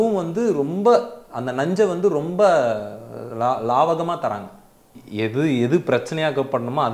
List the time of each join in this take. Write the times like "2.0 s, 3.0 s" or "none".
5.0 s